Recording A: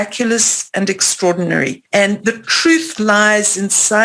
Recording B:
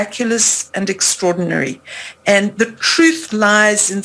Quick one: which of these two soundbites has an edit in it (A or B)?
A